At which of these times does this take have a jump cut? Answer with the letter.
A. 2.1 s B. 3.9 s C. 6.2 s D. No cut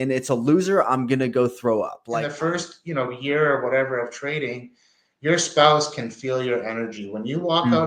A